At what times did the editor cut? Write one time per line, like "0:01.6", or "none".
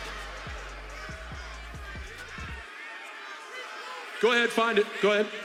none